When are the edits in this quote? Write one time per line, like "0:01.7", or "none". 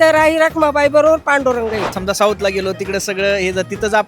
0:01.9